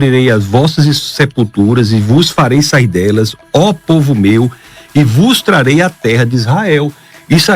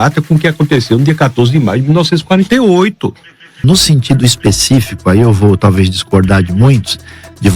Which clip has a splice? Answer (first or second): second